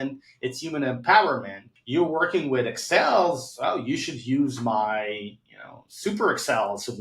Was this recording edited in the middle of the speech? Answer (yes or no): yes